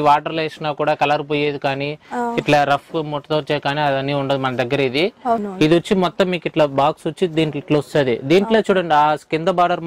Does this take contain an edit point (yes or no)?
yes